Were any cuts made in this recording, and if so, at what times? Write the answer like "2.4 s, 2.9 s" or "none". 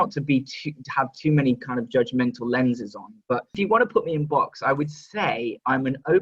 3.6 s